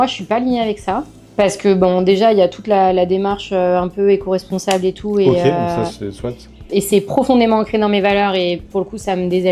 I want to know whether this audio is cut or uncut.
uncut